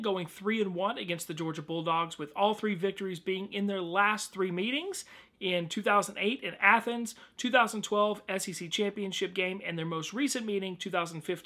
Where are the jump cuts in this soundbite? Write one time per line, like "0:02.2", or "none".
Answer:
0:01.4